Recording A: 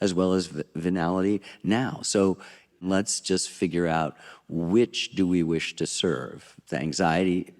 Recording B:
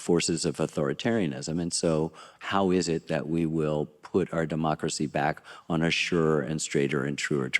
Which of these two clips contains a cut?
A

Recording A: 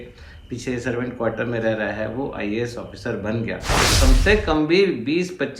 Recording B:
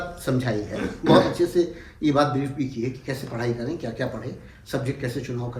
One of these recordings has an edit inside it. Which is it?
A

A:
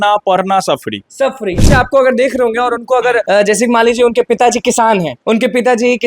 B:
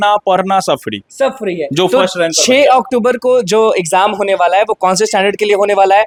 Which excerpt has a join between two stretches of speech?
A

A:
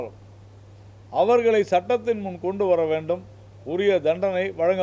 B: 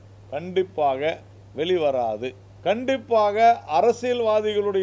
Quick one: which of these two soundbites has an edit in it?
B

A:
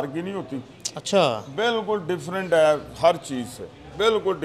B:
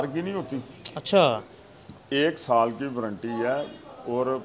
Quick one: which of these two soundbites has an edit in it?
B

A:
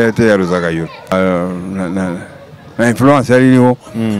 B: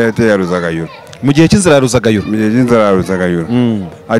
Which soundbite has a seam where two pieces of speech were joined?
A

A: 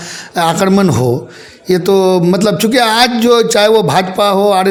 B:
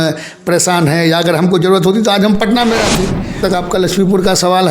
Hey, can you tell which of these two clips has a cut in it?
B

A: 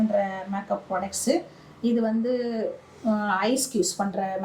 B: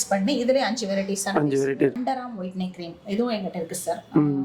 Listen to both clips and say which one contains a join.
B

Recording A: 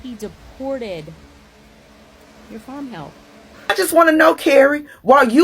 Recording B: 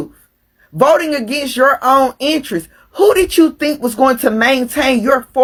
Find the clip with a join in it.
A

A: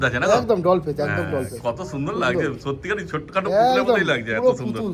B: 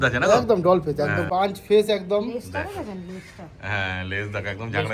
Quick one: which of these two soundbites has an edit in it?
B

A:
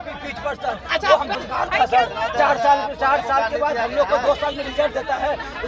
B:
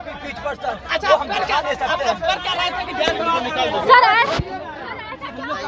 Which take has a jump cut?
A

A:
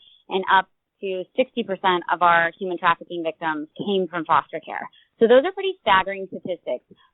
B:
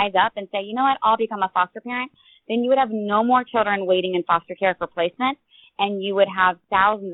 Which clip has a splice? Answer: A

